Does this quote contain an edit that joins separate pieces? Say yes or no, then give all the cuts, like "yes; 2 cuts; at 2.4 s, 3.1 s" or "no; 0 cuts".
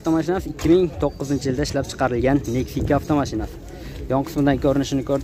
no; 0 cuts